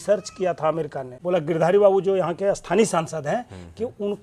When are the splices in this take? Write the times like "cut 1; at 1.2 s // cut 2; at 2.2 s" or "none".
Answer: cut 1; at 1.0 s